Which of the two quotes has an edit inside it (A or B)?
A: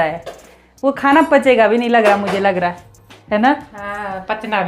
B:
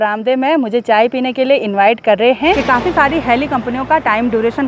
B